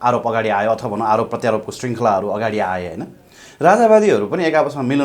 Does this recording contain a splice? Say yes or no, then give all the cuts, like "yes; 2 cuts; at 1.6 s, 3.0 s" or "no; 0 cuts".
no; 0 cuts